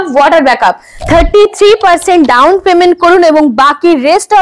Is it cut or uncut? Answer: cut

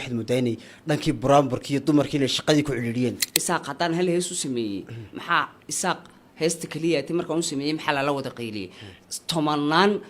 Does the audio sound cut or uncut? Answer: cut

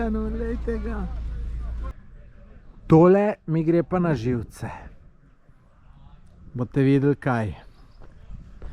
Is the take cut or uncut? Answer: cut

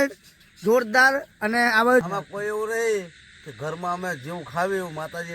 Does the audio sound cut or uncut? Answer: cut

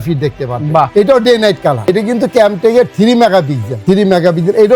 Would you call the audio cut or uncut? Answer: cut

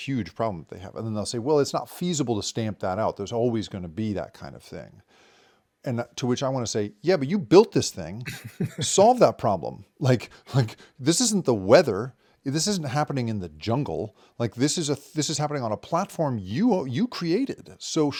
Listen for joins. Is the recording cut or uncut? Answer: uncut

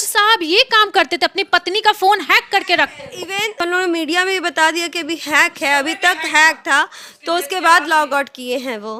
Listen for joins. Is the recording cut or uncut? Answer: uncut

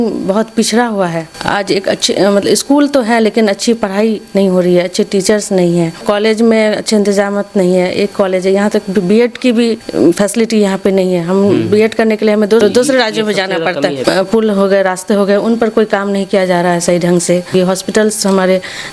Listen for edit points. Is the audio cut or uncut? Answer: cut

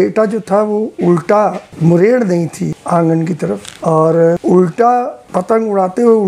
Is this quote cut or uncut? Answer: cut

